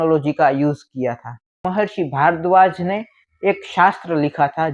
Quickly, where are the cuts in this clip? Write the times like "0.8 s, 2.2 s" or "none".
1.6 s